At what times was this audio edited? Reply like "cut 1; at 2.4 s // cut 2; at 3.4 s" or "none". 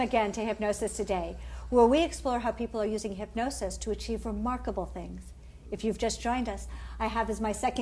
cut 1; at 3.2 s

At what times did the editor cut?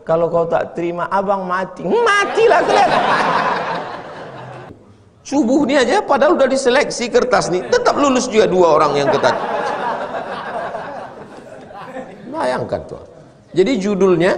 cut 1; at 4.7 s

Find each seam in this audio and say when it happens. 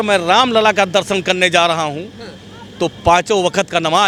none

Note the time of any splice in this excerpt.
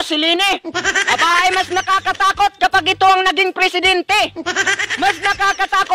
cut 1; at 4.4 s

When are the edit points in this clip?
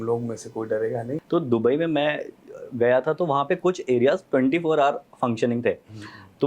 cut 1; at 1.1 s

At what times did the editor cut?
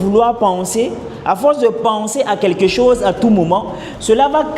none

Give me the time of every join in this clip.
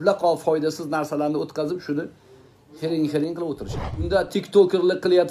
cut 1; at 4.1 s

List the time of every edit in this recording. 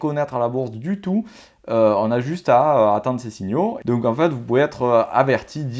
cut 1; at 3.8 s

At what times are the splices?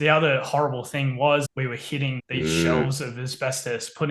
cut 1; at 1.5 s

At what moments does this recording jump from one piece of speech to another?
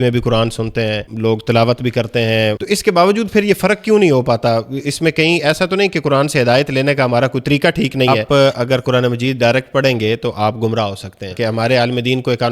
cut 1; at 1.1 s // cut 2; at 2.6 s // cut 3; at 8.2 s // cut 4; at 11.3 s

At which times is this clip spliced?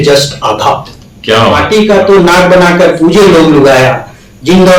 cut 1; at 1.6 s

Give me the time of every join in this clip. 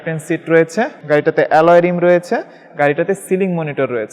cut 1; at 1.0 s

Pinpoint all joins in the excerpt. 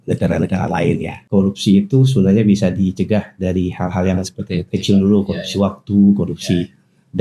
cut 1; at 1.2 s

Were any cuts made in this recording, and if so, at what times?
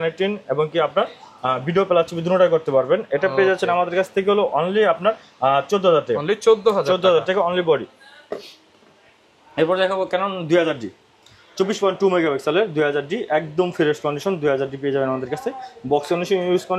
none

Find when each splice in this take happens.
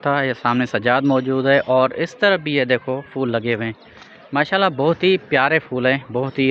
none

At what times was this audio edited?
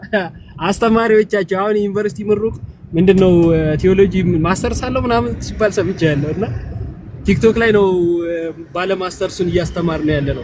none

